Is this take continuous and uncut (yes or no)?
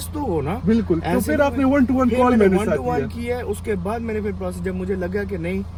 yes